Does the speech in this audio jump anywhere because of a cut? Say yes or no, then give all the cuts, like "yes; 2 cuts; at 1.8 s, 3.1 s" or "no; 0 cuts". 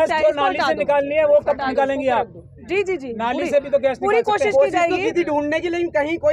no; 0 cuts